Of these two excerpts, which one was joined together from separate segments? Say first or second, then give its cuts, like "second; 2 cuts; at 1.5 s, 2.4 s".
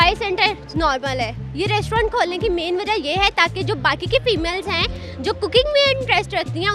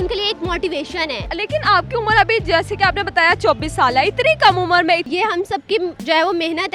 second; 2 cuts; at 1.2 s, 5.1 s